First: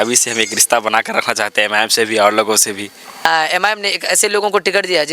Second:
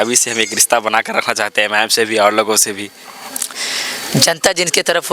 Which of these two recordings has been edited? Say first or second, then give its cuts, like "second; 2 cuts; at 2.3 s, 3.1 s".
first; 1 cut; at 3.2 s